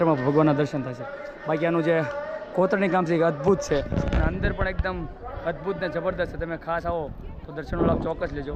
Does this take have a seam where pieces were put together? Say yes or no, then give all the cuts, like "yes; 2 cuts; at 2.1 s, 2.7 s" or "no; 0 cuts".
no; 0 cuts